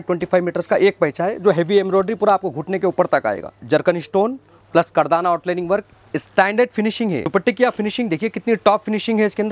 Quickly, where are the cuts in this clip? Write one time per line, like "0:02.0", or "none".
0:03.6
0:07.3